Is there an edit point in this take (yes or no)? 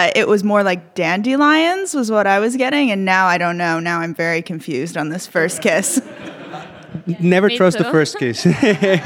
no